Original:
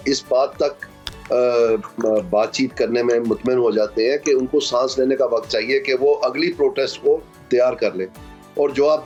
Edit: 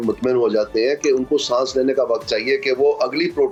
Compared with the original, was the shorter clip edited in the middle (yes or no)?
no